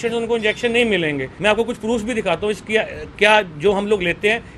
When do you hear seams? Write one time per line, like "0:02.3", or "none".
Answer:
0:01.3